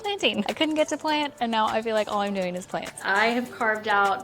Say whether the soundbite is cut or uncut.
cut